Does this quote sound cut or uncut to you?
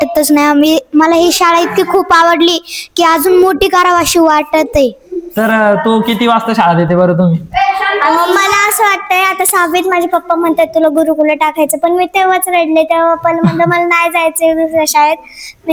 uncut